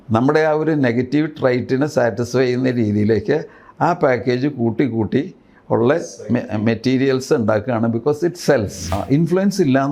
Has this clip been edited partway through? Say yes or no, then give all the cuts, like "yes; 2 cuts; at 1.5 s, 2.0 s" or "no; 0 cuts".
yes; 1 cut; at 8.9 s